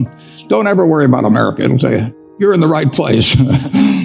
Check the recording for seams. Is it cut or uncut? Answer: cut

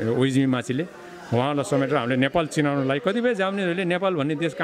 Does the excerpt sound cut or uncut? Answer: uncut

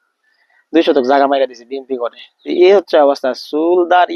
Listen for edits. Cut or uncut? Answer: cut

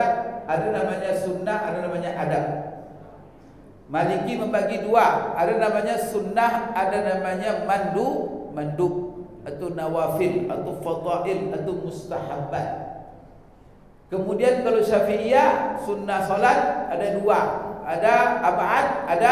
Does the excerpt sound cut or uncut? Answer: uncut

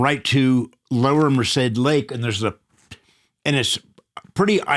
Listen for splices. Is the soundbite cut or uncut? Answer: uncut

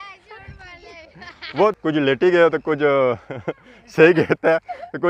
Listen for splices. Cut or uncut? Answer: cut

